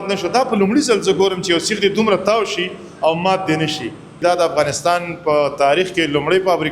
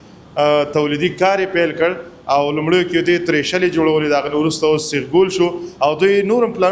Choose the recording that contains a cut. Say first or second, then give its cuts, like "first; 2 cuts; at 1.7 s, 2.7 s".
first; 1 cut; at 4.2 s